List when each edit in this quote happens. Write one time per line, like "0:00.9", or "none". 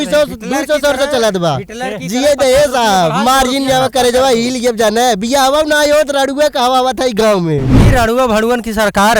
0:07.8